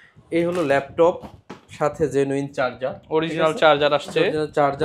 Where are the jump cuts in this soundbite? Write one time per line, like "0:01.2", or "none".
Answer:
none